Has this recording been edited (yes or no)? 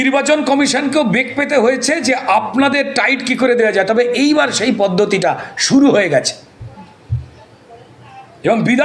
no